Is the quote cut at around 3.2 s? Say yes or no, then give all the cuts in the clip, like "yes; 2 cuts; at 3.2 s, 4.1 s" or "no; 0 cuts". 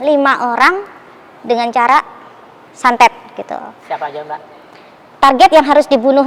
no; 0 cuts